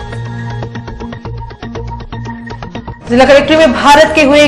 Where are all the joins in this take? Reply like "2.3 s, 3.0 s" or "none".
none